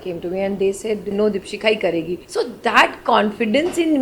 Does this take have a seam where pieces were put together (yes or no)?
yes